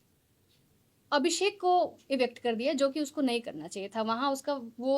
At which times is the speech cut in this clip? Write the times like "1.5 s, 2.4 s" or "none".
none